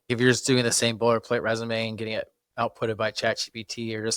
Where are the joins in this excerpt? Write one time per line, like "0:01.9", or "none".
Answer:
none

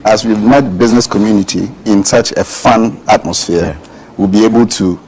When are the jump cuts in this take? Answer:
0:01.7

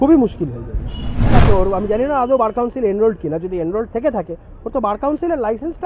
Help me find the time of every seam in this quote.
0:01.3

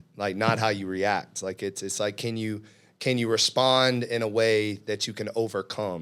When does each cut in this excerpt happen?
none

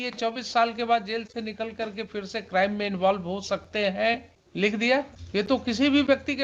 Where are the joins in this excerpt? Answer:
0:04.4
0:05.2

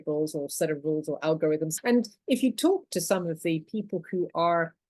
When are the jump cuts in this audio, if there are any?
0:01.7

